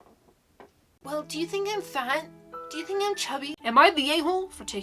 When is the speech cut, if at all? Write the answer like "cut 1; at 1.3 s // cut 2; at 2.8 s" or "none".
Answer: cut 1; at 1.0 s // cut 2; at 3.5 s